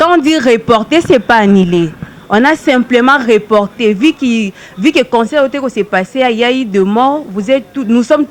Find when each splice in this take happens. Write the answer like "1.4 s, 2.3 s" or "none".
none